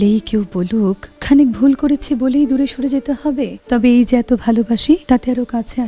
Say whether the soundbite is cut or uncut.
cut